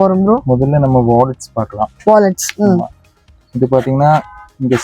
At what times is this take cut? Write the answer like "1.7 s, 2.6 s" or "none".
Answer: none